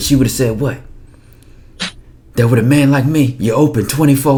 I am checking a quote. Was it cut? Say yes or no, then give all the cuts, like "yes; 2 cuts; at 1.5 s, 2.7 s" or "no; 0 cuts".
no; 0 cuts